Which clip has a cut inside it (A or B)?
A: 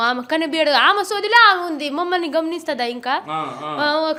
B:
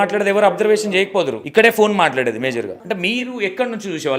B